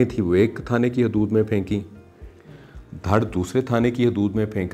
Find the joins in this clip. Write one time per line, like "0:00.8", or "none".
none